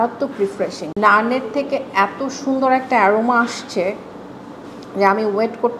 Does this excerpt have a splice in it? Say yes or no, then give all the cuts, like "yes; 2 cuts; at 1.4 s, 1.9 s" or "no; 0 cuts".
yes; 1 cut; at 0.9 s